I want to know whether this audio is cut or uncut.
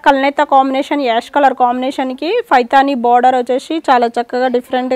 uncut